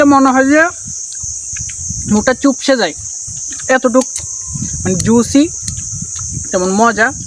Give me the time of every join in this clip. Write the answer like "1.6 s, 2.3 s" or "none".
none